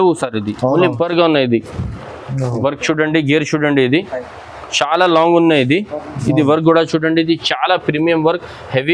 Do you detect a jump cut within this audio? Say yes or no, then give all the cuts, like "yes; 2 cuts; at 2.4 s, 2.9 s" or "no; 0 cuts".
yes; 1 cut; at 0.9 s